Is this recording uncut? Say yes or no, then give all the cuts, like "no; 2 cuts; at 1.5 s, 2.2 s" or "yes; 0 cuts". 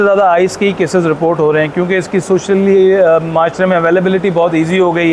yes; 0 cuts